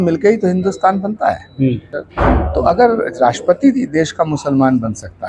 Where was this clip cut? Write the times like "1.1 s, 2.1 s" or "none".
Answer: 1.9 s